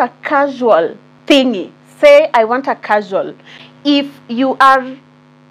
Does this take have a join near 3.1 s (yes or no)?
yes